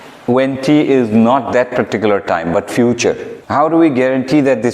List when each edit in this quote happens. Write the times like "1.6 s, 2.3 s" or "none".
3.3 s